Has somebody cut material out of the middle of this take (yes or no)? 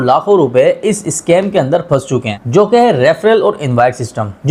no